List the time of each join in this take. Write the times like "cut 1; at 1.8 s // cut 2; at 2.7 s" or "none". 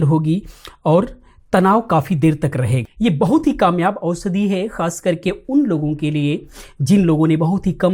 cut 1; at 2.8 s